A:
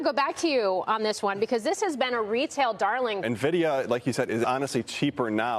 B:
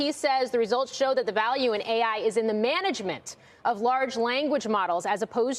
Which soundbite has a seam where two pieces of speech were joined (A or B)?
A